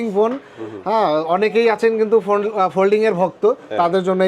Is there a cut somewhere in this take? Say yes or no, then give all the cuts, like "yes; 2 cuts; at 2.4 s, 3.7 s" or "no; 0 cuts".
no; 0 cuts